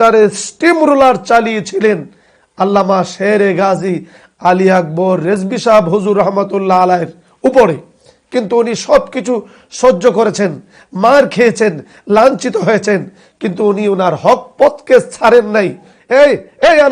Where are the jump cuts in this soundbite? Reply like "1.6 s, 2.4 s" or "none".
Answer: 15.9 s